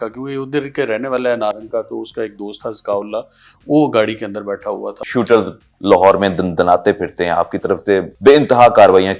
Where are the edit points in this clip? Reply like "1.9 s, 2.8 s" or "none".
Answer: 5.0 s, 8.1 s